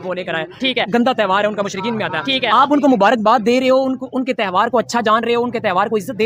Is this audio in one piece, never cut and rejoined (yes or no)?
yes